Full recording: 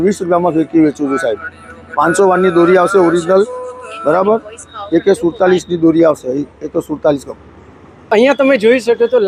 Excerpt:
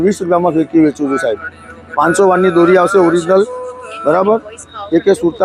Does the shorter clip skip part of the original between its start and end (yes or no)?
no